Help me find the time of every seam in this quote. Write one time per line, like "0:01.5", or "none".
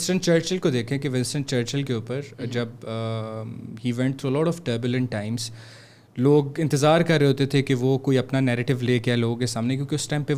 none